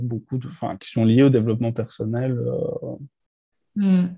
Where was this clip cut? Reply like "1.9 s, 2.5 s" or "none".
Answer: none